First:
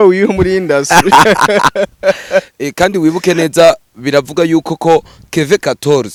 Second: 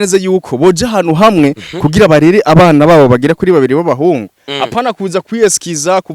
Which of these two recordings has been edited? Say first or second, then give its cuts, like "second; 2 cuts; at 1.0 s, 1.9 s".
second; 1 cut; at 4.4 s